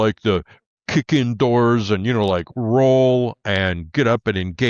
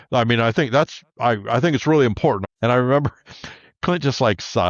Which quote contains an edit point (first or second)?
second